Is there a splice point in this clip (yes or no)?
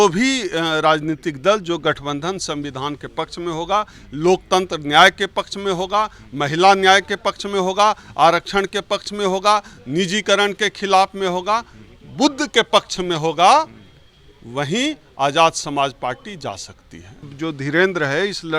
yes